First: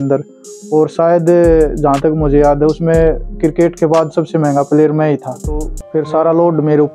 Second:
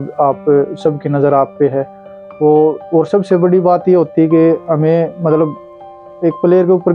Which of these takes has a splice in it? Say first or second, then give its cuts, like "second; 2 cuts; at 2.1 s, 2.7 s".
first; 1 cut; at 5.8 s